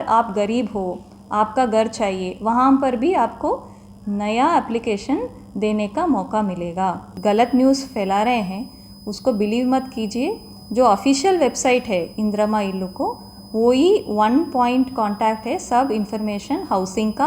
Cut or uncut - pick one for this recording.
cut